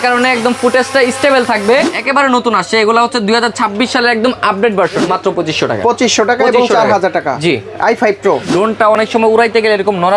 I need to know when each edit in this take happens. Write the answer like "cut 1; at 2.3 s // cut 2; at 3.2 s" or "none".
cut 1; at 1.9 s // cut 2; at 5.0 s // cut 3; at 8.5 s